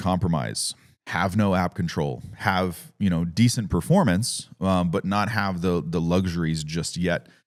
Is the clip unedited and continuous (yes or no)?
yes